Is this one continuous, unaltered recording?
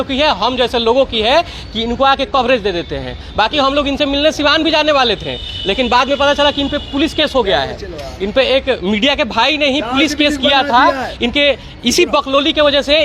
yes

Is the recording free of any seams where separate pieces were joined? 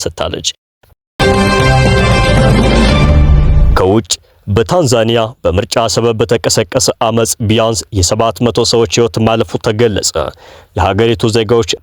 no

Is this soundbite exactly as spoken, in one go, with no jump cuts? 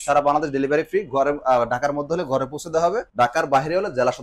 no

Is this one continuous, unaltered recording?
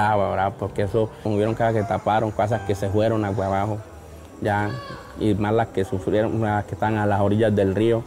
no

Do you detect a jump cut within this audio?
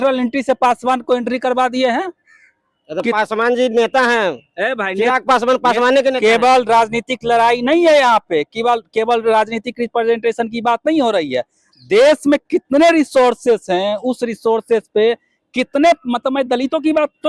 no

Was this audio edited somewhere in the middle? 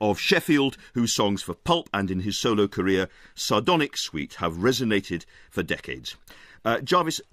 no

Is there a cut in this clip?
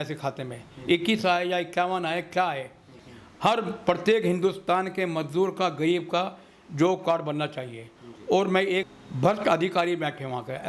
yes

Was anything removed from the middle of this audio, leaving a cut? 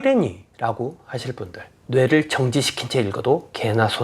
yes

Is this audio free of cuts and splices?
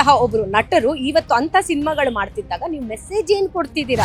yes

